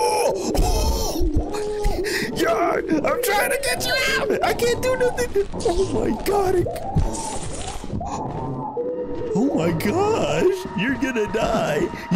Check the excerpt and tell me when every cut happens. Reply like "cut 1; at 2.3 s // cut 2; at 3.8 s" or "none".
none